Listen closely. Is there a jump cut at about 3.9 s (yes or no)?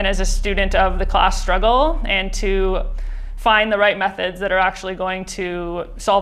no